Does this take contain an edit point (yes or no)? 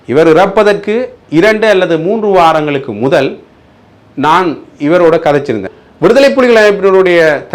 yes